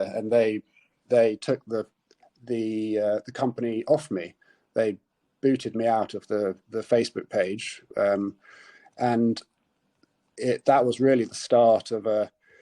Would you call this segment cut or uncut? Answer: uncut